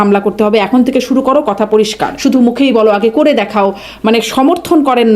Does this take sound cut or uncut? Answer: cut